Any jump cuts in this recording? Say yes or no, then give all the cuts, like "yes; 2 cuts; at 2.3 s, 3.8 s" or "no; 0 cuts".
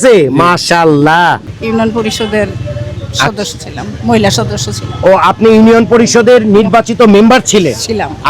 yes; 1 cut; at 1.5 s